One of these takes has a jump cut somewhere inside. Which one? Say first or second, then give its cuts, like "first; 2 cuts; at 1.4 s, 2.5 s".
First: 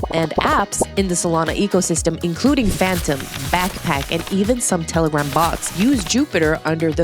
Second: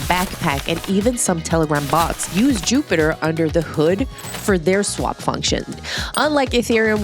second; 1 cut; at 5.8 s